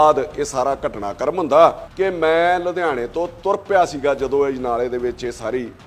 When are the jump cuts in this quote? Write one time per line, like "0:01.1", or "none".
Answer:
0:01.8